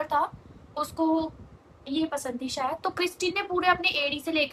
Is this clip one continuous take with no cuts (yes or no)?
yes